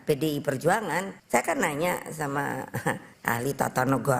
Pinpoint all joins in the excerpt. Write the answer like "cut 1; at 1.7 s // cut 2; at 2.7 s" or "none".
cut 1; at 1.2 s // cut 2; at 3.1 s